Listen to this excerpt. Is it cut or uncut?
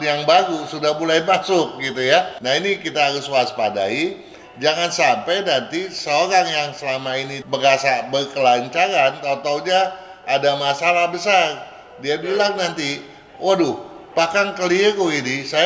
cut